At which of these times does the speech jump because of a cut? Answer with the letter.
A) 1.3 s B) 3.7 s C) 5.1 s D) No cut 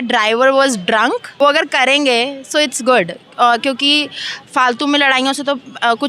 A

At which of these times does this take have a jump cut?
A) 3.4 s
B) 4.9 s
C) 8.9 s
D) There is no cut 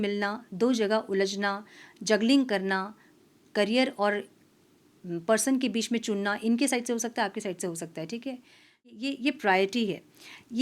C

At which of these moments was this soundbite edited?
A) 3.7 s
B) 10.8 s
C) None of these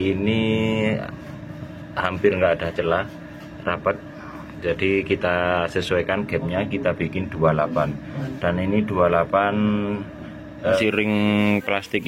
B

